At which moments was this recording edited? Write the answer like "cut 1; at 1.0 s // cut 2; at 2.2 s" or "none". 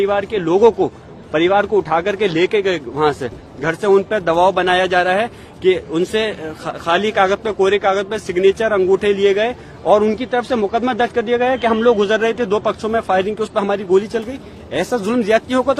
none